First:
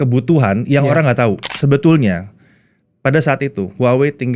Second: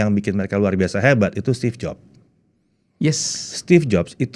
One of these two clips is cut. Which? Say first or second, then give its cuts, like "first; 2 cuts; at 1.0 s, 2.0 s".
first; 1 cut; at 1.5 s